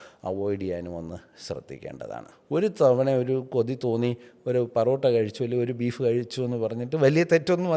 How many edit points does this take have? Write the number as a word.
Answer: one